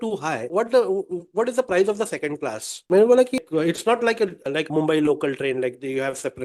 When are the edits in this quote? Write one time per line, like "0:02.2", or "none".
0:03.4